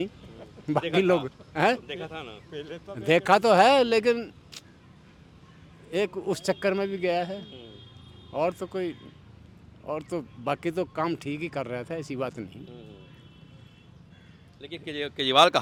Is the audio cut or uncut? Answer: uncut